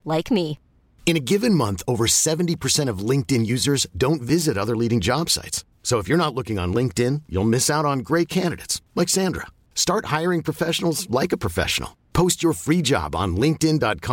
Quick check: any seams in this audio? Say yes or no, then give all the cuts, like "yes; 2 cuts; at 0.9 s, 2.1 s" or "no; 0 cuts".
no; 0 cuts